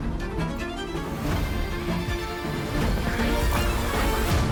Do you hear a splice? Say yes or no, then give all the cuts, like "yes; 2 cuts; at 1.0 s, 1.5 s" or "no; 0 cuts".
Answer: no; 0 cuts